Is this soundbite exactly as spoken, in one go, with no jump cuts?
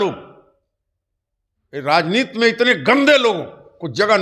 yes; 0 cuts

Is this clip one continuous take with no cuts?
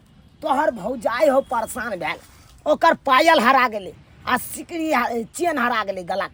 yes; 0 cuts

